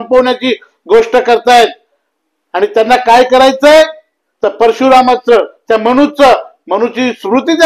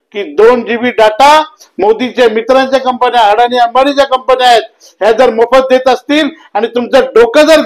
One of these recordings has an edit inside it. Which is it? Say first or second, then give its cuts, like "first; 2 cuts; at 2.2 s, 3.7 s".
second; 1 cut; at 1.6 s